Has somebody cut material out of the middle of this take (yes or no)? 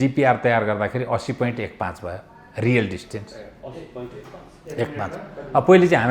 no